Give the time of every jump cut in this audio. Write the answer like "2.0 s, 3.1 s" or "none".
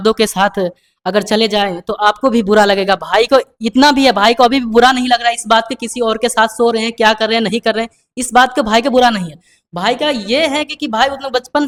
none

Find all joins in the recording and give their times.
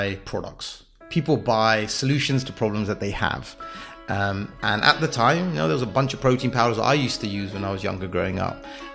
none

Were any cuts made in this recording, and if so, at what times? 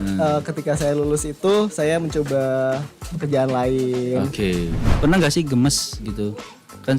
4.9 s

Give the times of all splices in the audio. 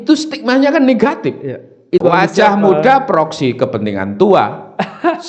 2.0 s

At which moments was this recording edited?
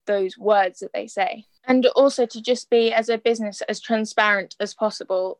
1.5 s

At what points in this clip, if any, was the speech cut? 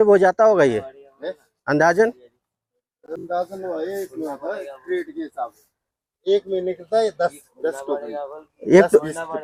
none

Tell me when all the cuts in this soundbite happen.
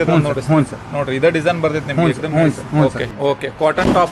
3.1 s

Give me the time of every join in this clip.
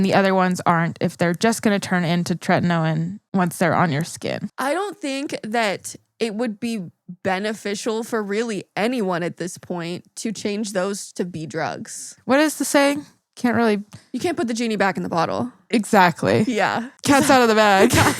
3.2 s, 4.5 s, 12.1 s

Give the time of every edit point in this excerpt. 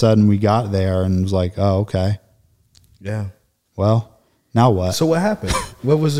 none

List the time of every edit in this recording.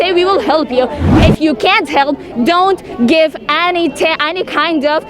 1.1 s

